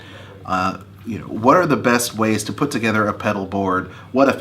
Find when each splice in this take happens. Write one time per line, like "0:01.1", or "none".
0:02.9